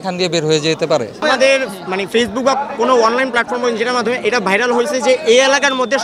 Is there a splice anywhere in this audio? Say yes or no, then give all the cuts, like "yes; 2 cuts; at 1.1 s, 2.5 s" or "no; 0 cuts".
no; 0 cuts